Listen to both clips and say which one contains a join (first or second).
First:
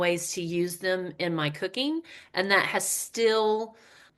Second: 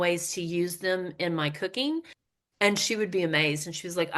second